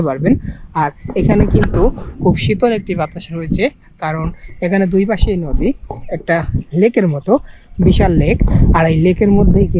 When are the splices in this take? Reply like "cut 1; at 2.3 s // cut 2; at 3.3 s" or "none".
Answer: none